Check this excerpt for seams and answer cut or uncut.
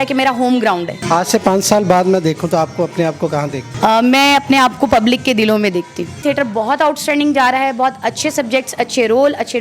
cut